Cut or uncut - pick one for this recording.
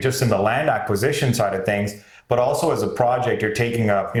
uncut